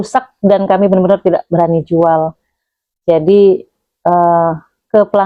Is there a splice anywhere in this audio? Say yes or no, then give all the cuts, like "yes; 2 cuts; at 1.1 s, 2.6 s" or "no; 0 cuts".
no; 0 cuts